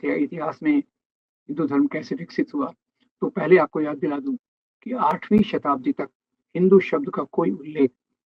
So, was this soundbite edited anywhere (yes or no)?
no